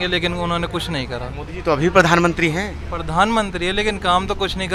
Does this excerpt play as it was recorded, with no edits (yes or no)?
yes